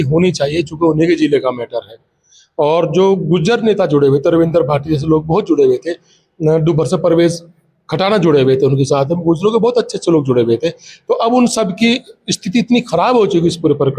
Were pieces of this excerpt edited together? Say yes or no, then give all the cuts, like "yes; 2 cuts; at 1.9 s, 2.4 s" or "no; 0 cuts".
no; 0 cuts